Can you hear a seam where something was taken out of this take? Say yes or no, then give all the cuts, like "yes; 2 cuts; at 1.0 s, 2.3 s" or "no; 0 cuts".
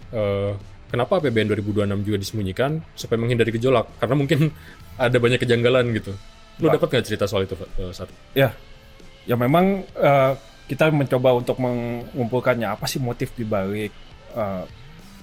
no; 0 cuts